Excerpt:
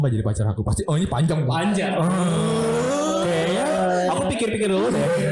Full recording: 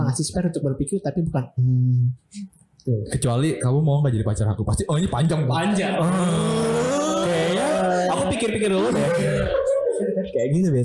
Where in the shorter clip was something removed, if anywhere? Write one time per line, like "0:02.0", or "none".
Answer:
none